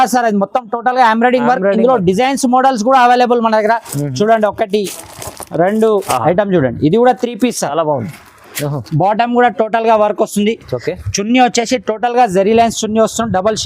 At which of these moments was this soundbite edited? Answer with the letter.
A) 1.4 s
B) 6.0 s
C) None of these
B